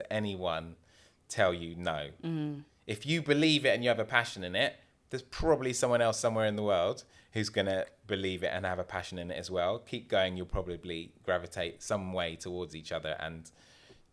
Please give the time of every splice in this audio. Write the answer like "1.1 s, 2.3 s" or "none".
none